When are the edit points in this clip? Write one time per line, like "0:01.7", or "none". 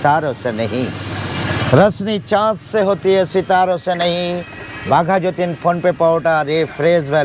none